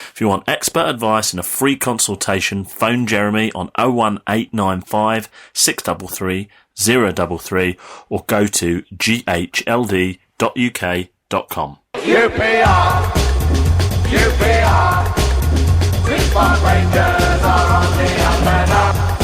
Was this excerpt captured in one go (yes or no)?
no